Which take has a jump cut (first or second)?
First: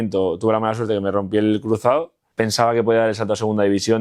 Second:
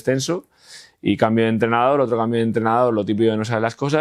first